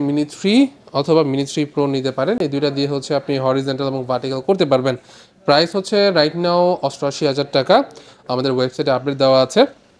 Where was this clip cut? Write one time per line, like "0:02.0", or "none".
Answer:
none